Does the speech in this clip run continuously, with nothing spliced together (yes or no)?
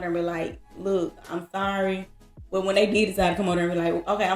yes